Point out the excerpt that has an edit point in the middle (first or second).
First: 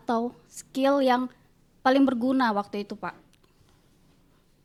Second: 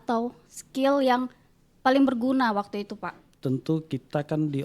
second